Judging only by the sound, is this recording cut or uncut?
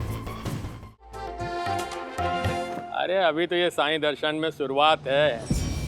cut